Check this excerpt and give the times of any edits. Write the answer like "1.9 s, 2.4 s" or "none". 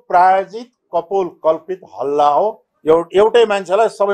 2.7 s